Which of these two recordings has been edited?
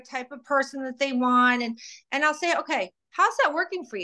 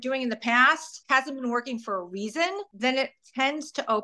second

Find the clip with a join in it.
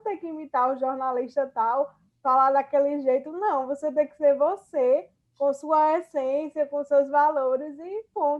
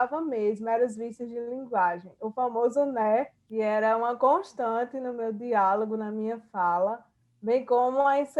second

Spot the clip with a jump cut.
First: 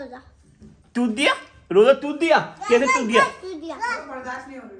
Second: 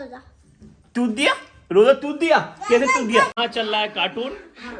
second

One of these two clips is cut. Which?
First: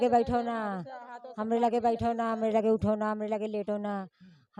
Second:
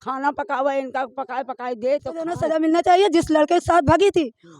second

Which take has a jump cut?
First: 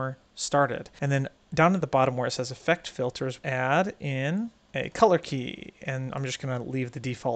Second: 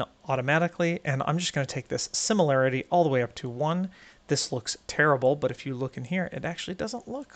first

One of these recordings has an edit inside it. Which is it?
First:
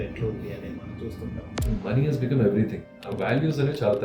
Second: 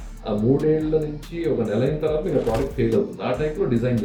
first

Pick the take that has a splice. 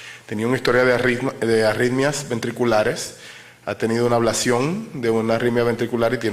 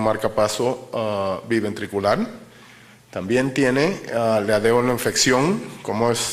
first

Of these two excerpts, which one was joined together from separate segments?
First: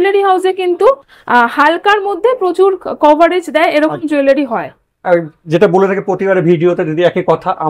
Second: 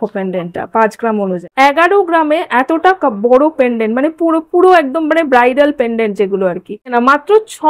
second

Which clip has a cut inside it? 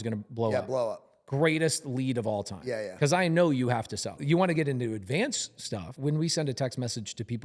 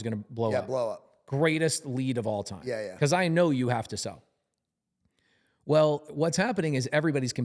first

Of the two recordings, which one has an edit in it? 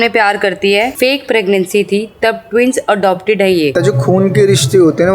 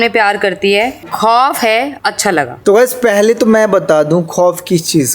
first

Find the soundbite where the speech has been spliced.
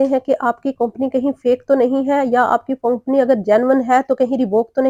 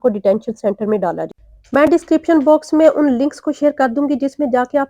second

